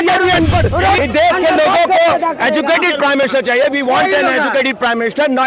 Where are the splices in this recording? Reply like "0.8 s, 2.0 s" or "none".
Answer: 1.0 s